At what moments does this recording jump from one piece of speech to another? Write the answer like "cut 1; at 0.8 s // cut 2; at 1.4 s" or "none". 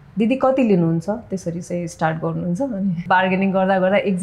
cut 1; at 3.1 s